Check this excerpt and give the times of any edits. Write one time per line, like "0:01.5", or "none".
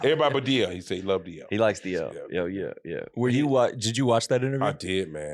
none